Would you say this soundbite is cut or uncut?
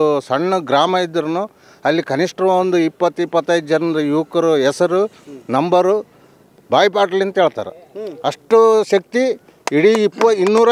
uncut